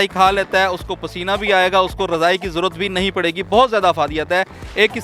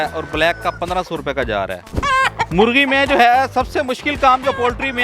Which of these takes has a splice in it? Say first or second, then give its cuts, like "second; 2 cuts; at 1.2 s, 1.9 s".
second; 1 cut; at 1.8 s